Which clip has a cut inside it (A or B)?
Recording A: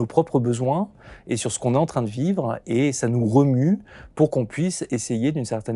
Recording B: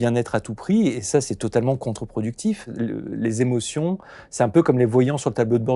B